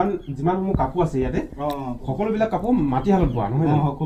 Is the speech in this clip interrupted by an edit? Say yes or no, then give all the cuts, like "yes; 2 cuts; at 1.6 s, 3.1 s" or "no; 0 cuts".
no; 0 cuts